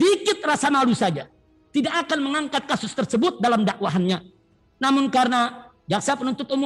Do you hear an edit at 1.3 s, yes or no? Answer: no